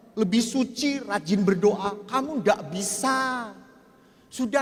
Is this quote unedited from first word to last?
yes; 0 cuts

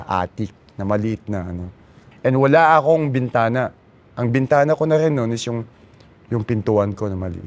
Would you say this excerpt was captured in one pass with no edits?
no; 1 cut; at 2.0 s

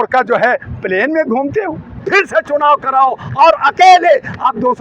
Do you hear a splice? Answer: yes; 1 cut; at 2.0 s

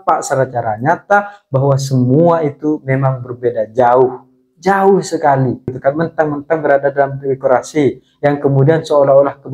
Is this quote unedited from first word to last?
no; 1 cut; at 5.7 s

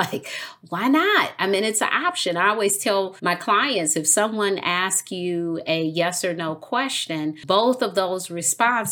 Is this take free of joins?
no; 2 cuts; at 3.1 s, 7.4 s

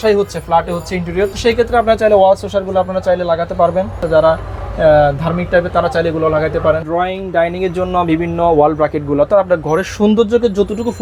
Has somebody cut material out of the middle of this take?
yes; 3 cuts; at 1.3 s, 4.0 s, 6.8 s

